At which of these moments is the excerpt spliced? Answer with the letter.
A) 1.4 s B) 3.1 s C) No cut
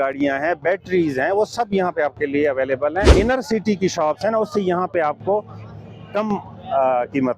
B